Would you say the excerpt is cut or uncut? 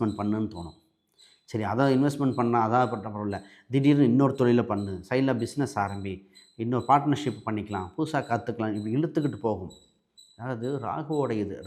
uncut